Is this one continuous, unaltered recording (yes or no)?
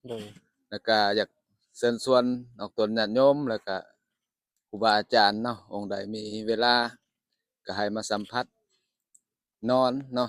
yes